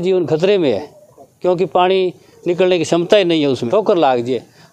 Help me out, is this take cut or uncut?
cut